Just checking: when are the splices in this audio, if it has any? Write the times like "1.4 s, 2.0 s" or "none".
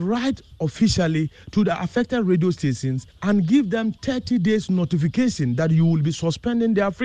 none